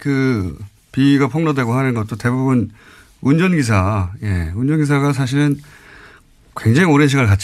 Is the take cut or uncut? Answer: uncut